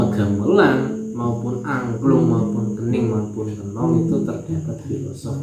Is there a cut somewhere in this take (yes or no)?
no